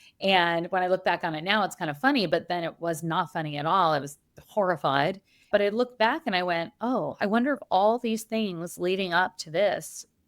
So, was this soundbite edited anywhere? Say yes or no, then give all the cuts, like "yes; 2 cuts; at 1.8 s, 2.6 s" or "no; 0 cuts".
yes; 1 cut; at 5.5 s